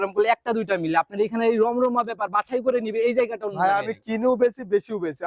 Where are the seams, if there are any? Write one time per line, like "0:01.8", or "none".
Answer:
none